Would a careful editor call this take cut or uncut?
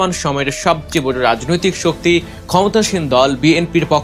uncut